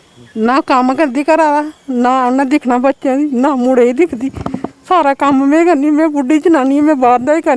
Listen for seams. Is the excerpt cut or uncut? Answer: uncut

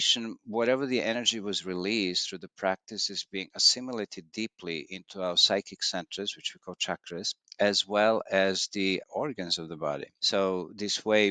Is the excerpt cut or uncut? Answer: cut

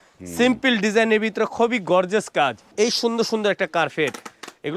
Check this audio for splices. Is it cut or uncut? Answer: cut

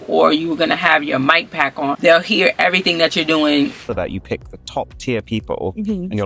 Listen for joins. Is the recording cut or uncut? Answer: cut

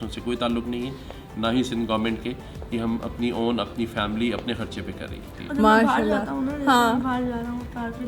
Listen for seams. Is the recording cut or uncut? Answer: cut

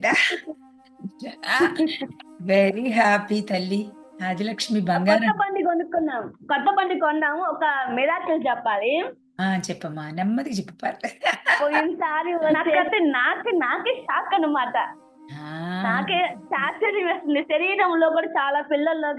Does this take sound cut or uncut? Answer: cut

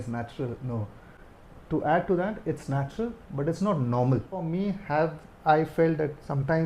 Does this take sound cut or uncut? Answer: cut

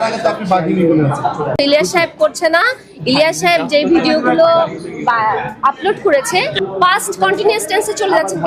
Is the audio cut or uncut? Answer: cut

